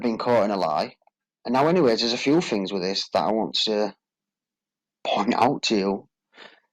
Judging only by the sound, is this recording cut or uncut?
cut